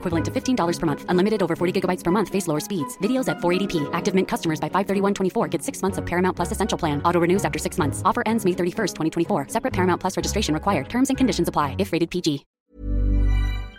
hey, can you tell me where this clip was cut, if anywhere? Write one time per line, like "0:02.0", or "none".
0:12.5